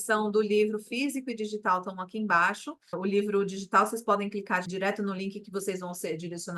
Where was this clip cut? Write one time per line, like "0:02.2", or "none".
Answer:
none